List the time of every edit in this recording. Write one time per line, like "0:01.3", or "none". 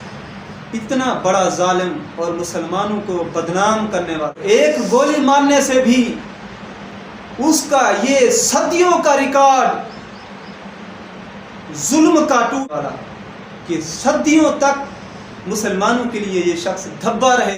0:04.4
0:12.6